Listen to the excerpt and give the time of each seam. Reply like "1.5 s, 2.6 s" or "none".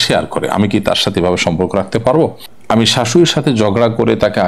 2.4 s